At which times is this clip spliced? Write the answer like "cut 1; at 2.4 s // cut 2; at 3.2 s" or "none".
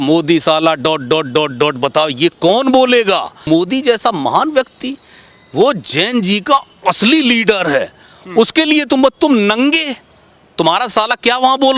cut 1; at 3.4 s